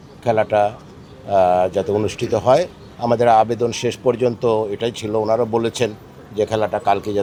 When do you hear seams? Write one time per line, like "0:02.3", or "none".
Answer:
none